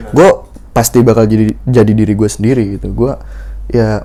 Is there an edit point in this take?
no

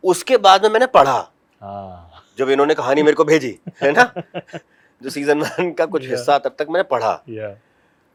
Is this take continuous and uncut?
yes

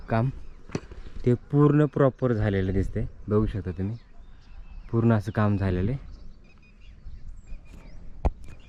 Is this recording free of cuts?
yes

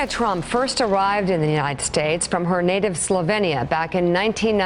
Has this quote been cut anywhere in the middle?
no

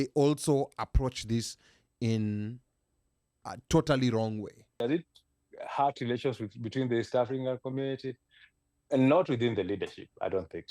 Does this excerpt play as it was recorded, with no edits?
no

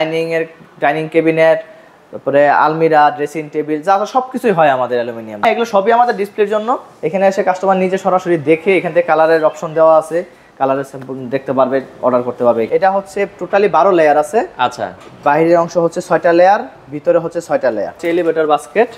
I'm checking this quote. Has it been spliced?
yes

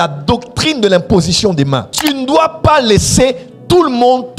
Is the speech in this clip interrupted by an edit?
yes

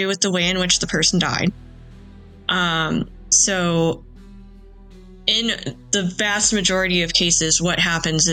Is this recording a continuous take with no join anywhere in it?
yes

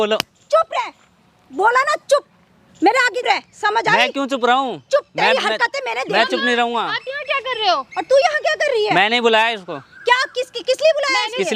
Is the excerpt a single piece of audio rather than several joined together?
yes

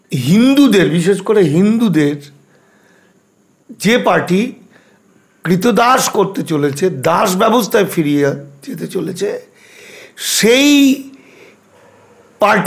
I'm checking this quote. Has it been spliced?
no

